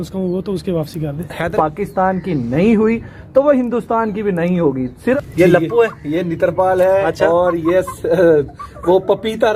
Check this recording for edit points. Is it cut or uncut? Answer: cut